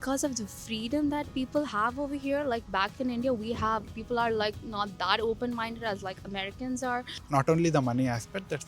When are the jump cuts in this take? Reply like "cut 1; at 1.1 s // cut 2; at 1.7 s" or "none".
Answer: cut 1; at 7.2 s